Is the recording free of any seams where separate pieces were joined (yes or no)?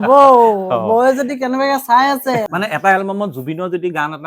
no